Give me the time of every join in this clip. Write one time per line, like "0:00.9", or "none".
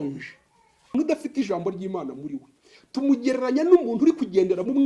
0:00.9